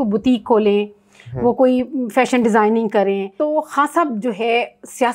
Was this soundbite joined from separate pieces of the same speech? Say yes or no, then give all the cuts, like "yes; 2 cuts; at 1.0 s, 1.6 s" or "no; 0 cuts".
yes; 1 cut; at 3.3 s